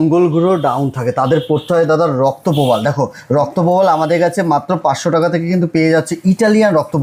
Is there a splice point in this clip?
no; 0 cuts

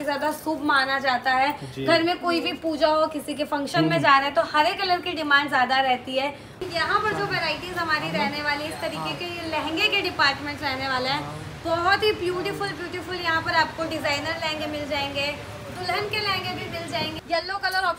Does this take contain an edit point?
yes; 2 cuts; at 6.8 s, 17.1 s

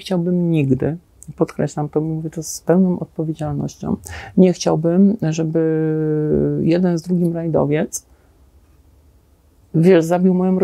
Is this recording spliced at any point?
no; 0 cuts

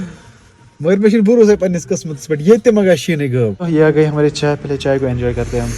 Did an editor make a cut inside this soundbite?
yes; 1 cut; at 3.6 s

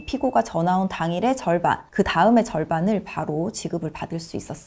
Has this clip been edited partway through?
no; 0 cuts

